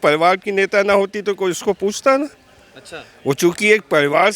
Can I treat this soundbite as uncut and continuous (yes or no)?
yes